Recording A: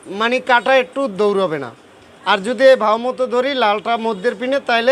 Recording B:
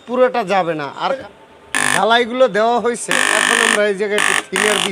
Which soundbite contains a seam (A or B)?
B